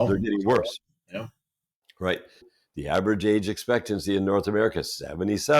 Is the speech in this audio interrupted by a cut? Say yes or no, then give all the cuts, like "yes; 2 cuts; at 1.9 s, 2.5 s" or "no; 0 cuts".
yes; 1 cut; at 2.5 s